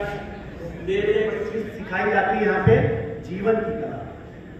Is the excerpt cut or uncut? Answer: cut